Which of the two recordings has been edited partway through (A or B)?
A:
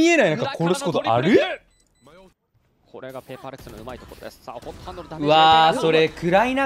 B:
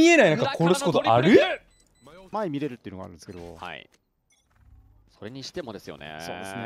A